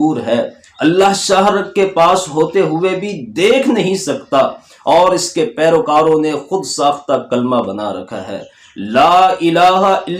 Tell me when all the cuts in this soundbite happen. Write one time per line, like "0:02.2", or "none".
none